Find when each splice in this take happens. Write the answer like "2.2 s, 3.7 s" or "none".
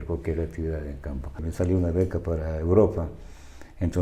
1.4 s